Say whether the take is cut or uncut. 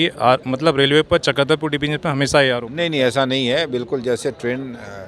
uncut